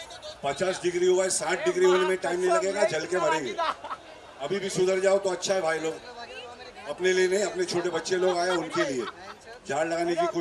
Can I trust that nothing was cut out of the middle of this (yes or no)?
yes